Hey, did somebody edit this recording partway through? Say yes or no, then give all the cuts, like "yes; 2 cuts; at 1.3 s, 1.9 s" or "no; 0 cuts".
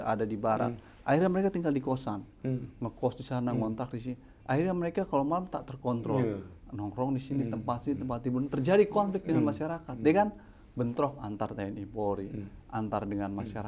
no; 0 cuts